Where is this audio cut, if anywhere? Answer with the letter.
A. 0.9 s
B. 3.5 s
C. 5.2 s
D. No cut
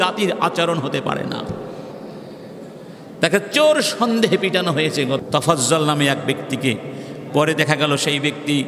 C